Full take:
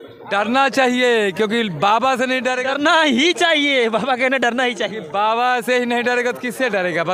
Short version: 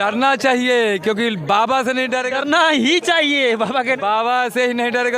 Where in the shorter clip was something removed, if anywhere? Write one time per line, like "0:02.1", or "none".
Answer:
0:04.0